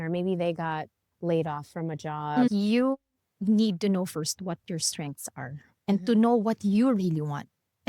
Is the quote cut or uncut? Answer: cut